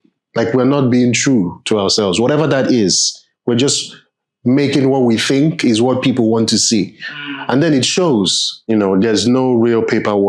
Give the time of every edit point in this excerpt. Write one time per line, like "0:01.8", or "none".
0:08.5